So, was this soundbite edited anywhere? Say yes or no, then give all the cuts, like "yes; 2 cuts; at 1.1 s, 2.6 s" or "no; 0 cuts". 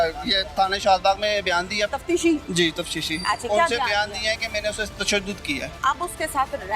yes; 2 cuts; at 1.9 s, 5.7 s